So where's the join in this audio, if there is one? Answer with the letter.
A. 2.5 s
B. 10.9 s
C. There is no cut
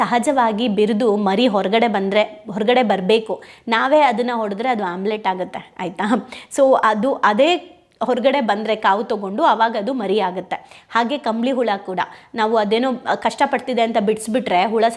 C